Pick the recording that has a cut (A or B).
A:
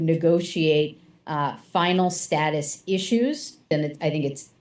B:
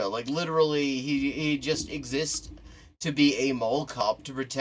A